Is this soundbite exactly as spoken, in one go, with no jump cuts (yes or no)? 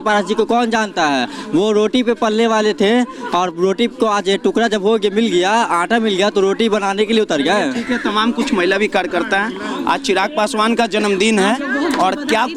yes